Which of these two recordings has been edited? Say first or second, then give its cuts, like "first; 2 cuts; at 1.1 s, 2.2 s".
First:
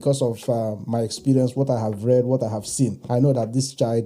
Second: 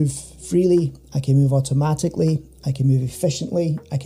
first; 1 cut; at 3.0 s